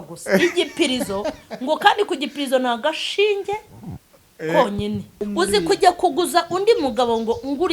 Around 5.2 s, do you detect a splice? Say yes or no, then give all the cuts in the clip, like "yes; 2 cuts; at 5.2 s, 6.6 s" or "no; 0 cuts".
yes; 1 cut; at 5.2 s